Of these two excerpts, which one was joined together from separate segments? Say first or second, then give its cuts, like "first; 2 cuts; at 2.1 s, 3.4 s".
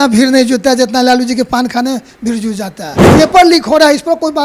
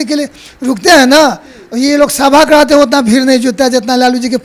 first; 1 cut; at 2.9 s